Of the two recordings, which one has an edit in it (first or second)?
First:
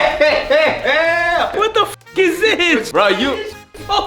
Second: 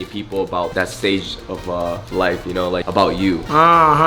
first